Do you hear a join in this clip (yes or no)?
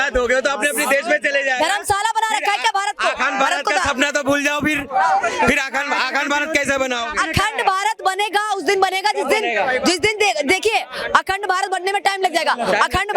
no